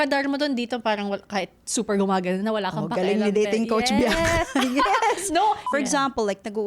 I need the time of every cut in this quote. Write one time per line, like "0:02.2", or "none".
0:05.6